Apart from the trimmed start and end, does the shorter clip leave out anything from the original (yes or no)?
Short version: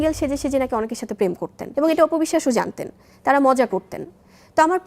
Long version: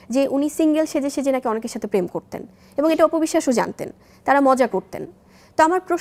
yes